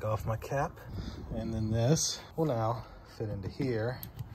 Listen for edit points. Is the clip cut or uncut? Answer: cut